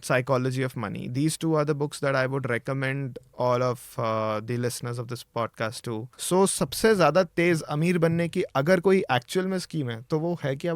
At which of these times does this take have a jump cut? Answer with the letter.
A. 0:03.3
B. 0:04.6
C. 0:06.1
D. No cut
C